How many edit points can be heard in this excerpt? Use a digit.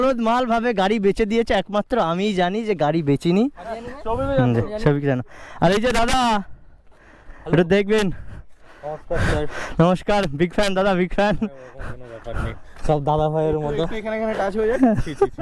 0